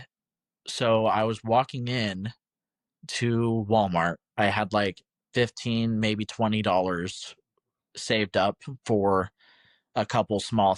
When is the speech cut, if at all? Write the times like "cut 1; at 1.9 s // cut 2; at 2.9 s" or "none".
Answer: none